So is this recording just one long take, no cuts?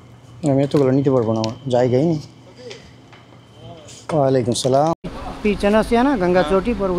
no; 1 cut; at 5.2 s

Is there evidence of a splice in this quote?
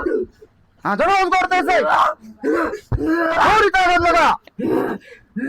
no; 0 cuts

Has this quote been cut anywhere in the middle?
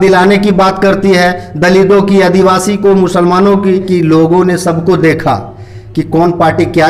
yes; 1 cut; at 3.9 s

